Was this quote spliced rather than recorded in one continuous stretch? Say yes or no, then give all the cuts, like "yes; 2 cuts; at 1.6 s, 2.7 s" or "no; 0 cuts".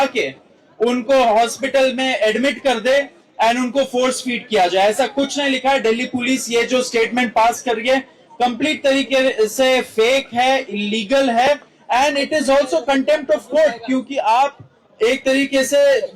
no; 0 cuts